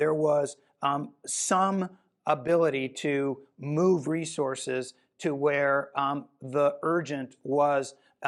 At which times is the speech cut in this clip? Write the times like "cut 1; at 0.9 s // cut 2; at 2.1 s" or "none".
none